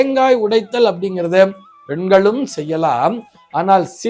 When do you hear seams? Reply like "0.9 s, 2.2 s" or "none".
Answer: none